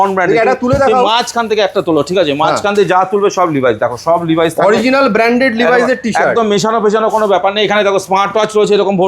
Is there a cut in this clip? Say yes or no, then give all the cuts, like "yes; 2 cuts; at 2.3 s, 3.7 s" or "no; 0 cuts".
no; 0 cuts